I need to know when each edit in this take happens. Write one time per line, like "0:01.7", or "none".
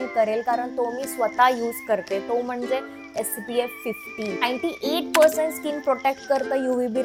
none

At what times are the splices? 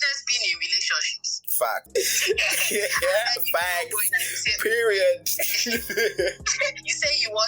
0:01.9

